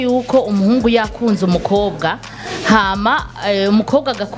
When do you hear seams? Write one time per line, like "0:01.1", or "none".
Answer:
none